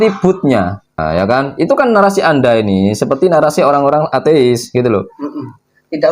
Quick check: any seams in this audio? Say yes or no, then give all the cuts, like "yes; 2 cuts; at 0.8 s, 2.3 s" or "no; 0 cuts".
yes; 1 cut; at 1.0 s